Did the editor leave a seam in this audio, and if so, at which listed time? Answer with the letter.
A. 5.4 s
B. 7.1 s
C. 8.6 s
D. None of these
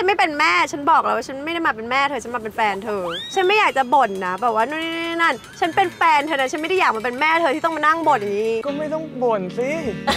C